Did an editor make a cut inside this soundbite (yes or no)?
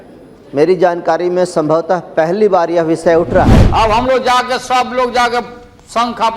yes